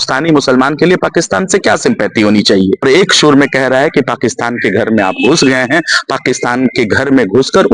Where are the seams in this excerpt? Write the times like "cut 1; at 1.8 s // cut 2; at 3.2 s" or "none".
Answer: cut 1; at 2.8 s